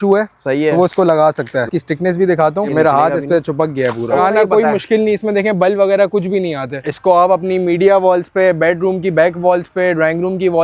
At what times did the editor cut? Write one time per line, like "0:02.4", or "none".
0:01.7
0:02.7
0:04.2
0:06.8